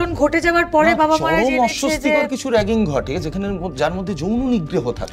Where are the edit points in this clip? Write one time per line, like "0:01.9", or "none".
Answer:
none